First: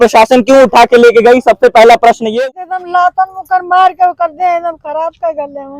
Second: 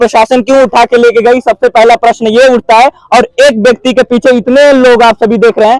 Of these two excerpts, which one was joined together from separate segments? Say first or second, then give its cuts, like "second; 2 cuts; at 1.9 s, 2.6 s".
first; 1 cut; at 2.4 s